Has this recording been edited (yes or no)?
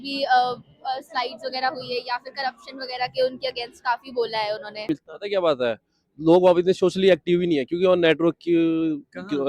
yes